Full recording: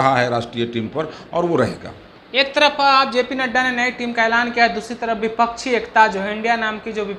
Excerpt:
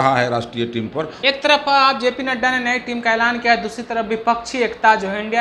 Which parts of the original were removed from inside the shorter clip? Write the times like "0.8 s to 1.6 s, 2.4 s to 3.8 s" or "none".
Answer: 1.1 s to 2.3 s